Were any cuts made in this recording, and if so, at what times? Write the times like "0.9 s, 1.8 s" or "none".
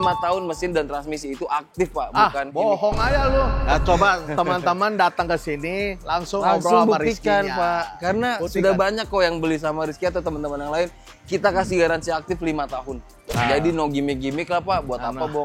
3.6 s